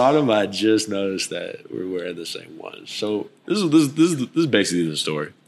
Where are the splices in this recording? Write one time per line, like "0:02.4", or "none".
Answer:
none